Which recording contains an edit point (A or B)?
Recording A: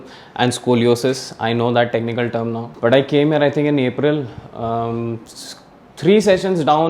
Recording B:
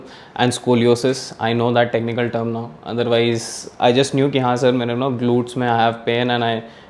A